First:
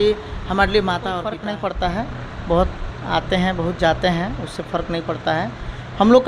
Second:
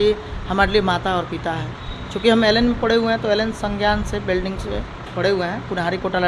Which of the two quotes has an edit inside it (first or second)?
first